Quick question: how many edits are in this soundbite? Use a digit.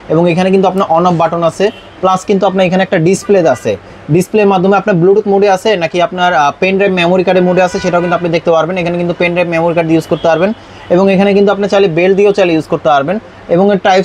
0